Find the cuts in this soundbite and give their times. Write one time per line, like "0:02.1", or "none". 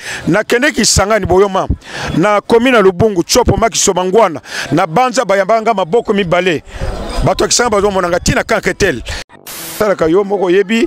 0:09.7